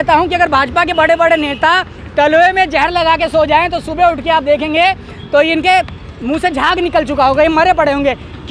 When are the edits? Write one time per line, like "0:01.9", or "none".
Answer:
none

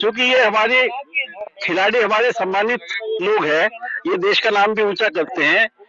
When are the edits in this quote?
none

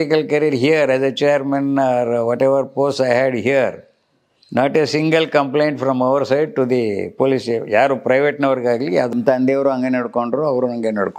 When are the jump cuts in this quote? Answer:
0:09.1

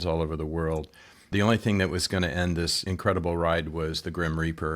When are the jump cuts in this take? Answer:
0:01.3
0:02.8

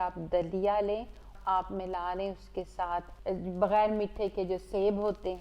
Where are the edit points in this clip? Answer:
0:01.3
0:03.1

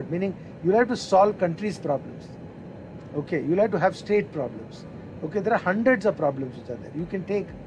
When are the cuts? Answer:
none

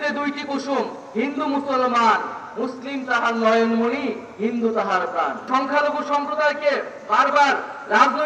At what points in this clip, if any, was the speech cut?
0:05.4

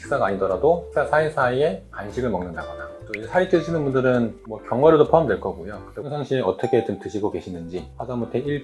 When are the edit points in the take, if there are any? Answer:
0:05.9

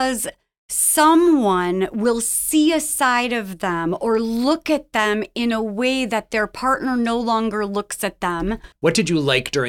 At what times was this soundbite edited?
0:08.7

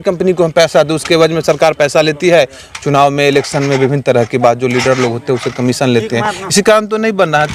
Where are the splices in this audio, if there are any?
none

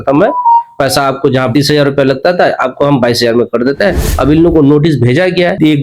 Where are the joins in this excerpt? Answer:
0:01.5
0:04.2

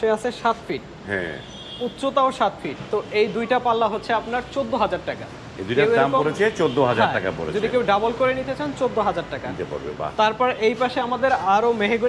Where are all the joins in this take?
none

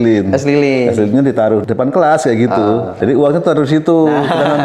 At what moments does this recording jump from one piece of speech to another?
0:01.6
0:02.9

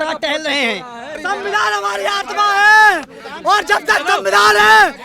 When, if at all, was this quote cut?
0:01.2

